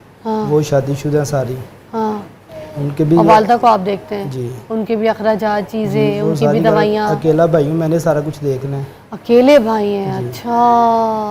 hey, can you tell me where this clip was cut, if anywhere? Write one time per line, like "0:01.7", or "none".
none